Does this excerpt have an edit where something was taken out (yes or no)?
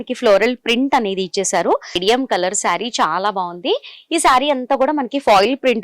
yes